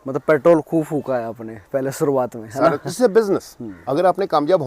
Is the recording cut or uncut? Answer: cut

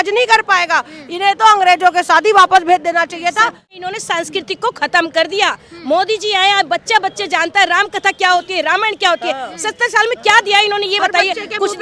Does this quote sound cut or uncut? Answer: cut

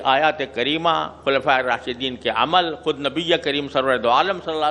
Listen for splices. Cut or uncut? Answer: uncut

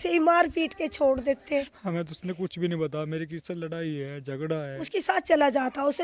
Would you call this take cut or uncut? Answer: cut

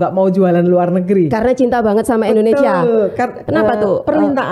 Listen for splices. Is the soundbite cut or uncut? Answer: cut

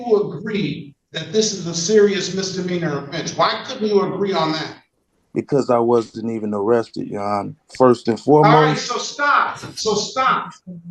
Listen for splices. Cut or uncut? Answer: uncut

